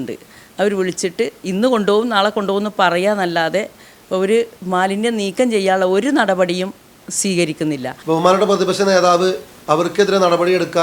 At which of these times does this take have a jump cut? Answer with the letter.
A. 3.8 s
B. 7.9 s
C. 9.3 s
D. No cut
B